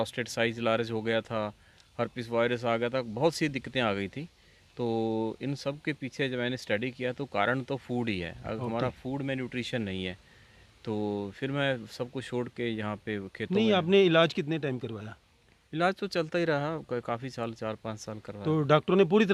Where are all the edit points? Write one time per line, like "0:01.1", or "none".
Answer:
none

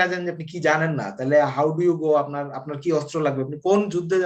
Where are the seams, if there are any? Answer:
none

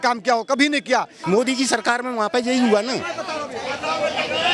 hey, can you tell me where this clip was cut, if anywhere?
0:01.1

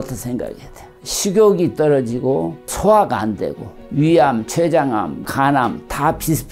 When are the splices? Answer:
0:02.7
0:03.8
0:05.2

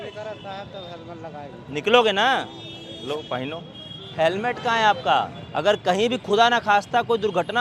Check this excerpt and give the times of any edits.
0:04.1
0:05.4

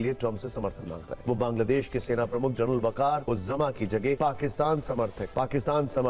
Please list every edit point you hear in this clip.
0:01.1
0:03.2
0:04.2

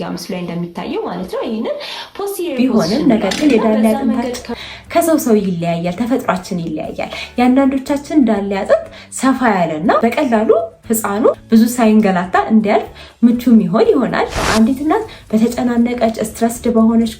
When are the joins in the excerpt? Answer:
0:02.5
0:14.4

